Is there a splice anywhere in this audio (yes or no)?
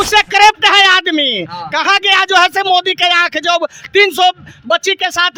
no